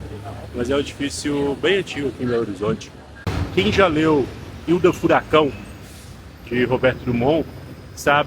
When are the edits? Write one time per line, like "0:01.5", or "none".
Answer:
0:03.3